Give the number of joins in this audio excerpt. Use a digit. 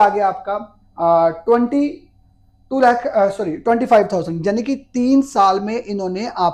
0